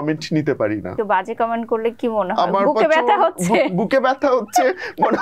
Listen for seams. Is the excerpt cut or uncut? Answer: cut